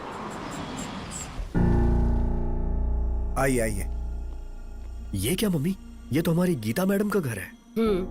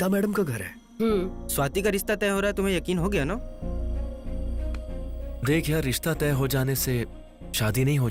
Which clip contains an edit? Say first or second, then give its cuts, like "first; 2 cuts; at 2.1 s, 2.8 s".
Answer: first; 1 cut; at 1.4 s